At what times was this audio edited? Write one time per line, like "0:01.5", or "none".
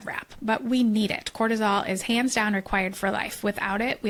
none

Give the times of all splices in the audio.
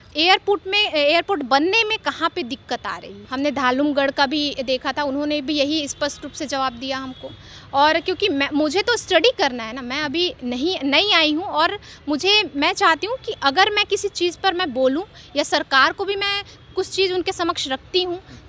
none

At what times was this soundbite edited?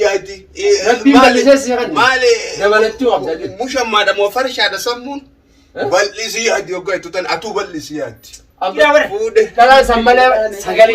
0:08.6

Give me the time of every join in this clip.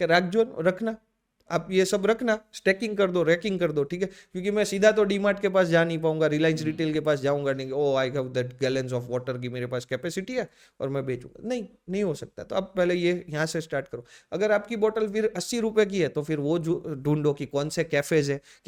none

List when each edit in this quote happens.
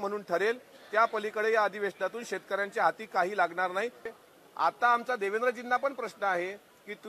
0:04.1

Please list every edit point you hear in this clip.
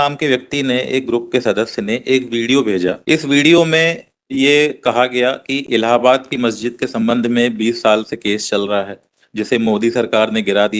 0:03.0

